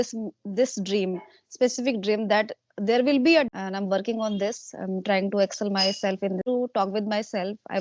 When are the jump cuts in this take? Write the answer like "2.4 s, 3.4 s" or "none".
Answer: 3.5 s, 6.4 s